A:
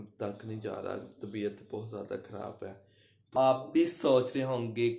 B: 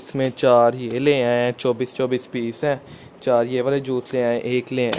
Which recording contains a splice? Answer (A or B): A